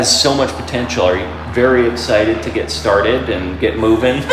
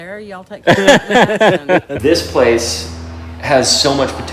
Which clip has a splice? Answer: second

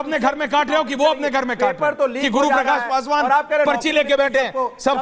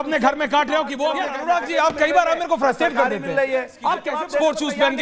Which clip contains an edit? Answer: second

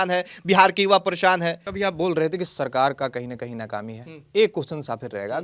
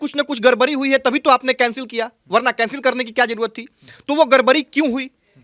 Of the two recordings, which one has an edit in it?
first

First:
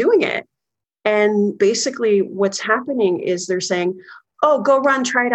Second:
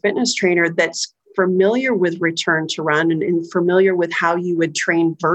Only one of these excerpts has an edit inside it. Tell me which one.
first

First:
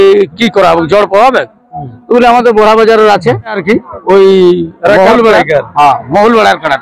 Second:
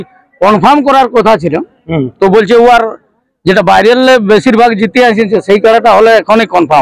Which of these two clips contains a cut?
first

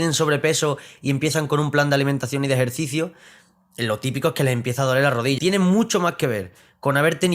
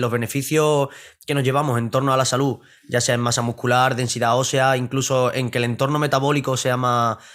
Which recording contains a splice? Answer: first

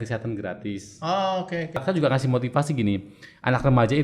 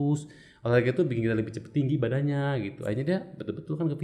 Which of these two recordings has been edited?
first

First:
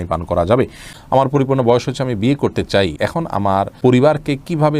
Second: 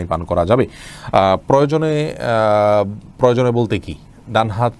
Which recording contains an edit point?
first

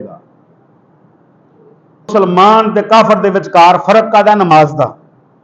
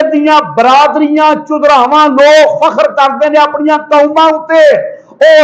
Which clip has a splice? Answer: first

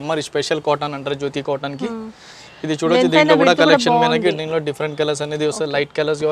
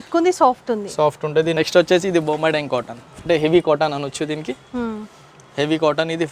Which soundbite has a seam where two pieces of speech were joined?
second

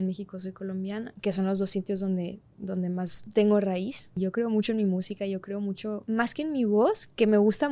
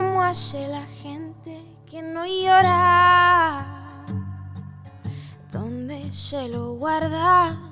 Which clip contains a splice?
first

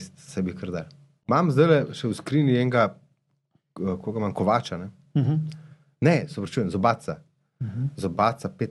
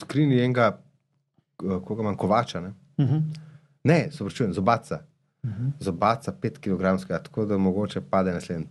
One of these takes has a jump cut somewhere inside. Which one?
first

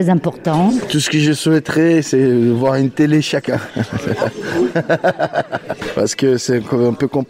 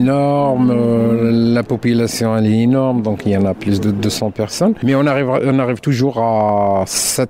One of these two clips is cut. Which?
first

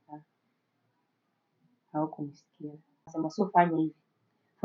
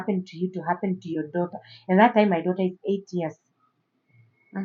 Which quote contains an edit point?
first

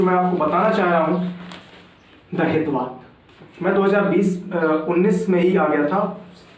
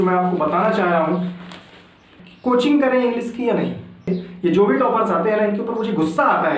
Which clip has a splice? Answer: second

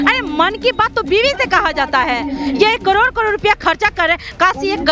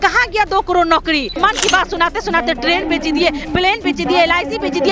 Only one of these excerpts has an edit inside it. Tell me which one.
second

